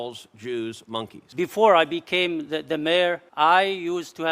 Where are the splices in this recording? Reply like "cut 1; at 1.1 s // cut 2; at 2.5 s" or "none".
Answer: cut 1; at 1.2 s // cut 2; at 3.2 s